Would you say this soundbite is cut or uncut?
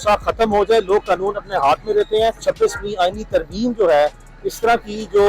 cut